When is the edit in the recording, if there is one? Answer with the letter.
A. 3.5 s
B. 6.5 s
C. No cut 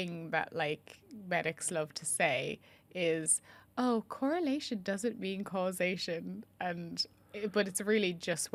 C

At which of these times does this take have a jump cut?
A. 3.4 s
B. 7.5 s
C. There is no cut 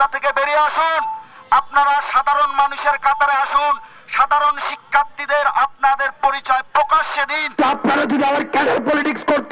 B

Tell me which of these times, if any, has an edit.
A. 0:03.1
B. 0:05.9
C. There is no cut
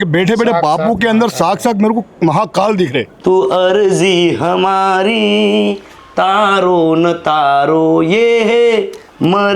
A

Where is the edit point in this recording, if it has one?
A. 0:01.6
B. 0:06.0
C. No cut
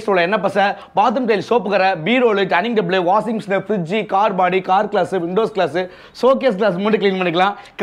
C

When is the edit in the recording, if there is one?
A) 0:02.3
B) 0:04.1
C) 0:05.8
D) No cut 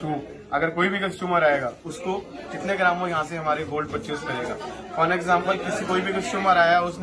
D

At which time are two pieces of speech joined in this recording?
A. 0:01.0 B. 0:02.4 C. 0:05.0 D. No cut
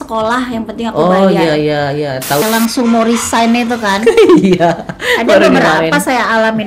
B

